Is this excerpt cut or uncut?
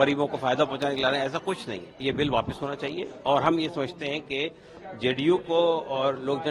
cut